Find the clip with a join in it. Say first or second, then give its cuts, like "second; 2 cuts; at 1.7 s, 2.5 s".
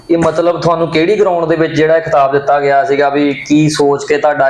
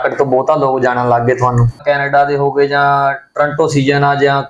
second; 1 cut; at 1.8 s